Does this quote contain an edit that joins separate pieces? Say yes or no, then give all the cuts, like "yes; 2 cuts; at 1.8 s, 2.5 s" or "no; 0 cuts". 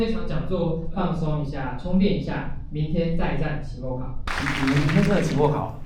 yes; 1 cut; at 4.3 s